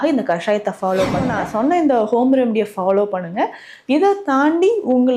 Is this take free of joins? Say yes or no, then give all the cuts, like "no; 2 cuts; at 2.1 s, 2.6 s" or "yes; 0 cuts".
no; 1 cut; at 1.3 s